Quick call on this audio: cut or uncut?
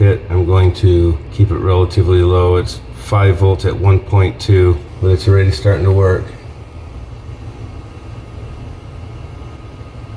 cut